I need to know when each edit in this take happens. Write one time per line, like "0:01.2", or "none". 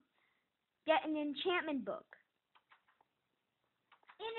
none